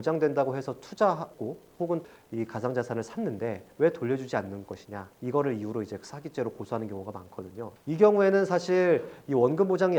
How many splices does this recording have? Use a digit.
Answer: 0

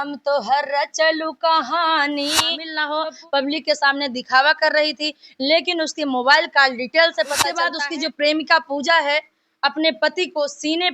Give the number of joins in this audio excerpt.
2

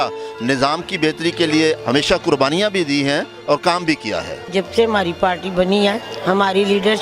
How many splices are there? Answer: 3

